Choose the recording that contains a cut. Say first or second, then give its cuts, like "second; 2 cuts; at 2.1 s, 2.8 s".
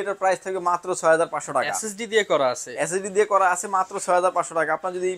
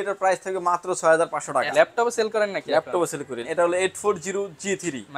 second; 2 cuts; at 1.7 s, 3.4 s